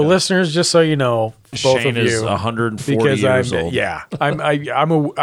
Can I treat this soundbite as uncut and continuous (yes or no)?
no